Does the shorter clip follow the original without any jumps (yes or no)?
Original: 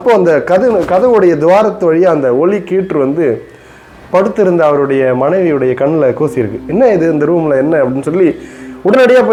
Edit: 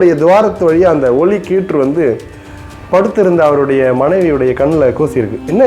yes